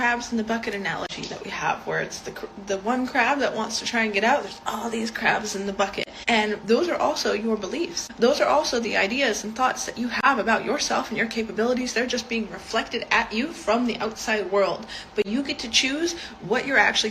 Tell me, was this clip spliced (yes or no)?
yes